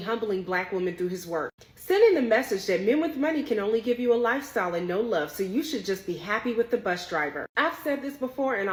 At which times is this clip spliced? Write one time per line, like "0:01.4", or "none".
none

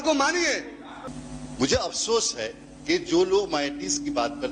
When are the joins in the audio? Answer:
0:01.0

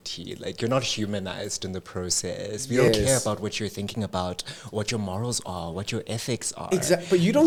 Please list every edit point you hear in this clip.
none

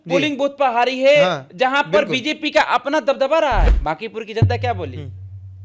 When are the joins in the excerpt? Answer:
0:03.6

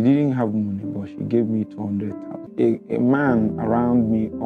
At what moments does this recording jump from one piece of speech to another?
0:02.5

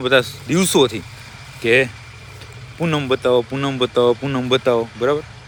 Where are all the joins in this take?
none

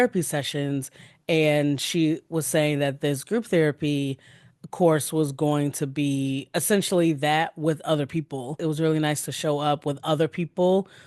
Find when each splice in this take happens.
0:08.5

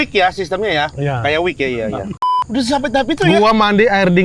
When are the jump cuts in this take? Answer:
0:02.3

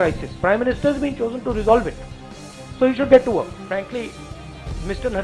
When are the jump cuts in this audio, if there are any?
0:03.6

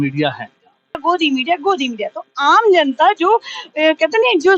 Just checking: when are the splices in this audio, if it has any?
0:01.0

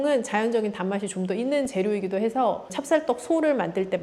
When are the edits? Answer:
0:02.7

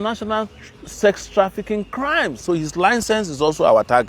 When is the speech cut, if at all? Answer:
0:02.4

